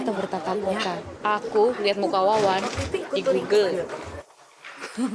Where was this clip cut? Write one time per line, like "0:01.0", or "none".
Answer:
0:01.1